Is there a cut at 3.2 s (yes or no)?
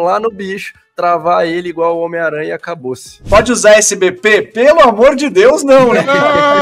yes